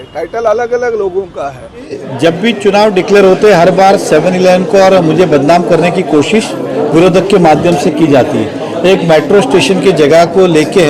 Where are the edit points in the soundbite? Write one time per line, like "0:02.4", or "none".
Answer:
0:02.0

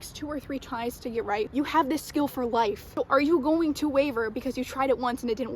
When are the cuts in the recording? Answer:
0:01.5
0:02.9

